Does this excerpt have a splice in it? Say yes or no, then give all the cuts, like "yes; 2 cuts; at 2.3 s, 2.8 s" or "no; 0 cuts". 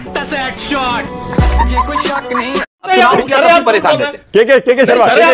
no; 0 cuts